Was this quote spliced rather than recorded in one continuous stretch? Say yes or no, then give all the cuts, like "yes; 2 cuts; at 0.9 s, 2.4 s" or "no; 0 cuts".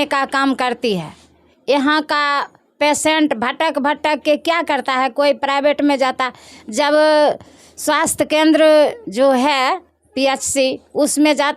no; 0 cuts